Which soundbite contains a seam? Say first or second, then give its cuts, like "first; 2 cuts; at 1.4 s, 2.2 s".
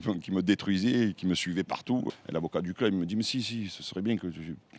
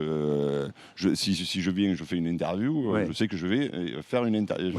first; 1 cut; at 2.1 s